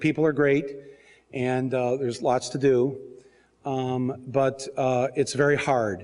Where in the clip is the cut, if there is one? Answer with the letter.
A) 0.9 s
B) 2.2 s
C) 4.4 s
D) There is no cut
B